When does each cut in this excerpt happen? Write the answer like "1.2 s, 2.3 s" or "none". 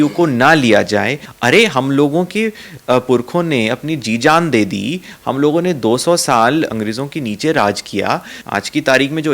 1.2 s, 6.7 s, 8.3 s